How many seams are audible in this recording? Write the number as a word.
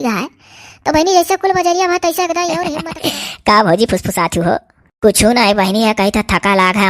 one